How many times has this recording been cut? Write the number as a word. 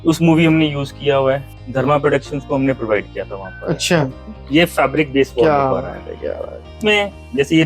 three